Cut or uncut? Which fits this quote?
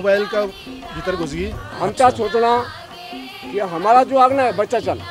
cut